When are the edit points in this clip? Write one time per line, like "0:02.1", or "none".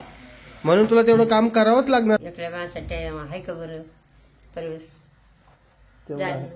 0:02.2